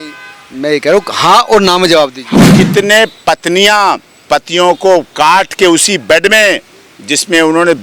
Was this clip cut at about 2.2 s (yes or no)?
yes